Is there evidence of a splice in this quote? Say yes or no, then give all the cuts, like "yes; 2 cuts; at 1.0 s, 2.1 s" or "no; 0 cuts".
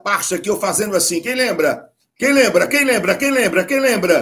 no; 0 cuts